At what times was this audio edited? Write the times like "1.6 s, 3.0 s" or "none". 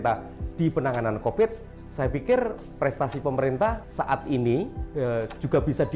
2.6 s, 3.8 s, 4.8 s